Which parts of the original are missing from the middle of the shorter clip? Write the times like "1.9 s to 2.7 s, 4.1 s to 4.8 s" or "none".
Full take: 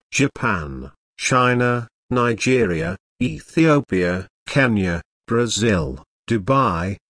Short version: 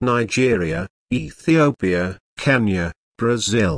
none